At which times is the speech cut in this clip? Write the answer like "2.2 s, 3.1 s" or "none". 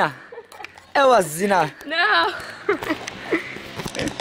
none